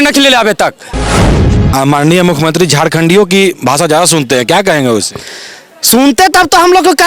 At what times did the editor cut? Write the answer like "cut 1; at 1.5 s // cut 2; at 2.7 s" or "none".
cut 1; at 1.4 s